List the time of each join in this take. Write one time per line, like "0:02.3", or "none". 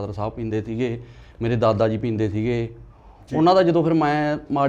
none